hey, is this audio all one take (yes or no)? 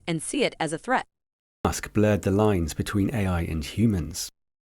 no